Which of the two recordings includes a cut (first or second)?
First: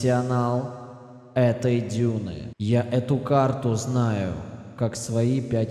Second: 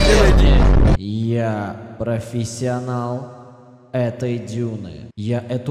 second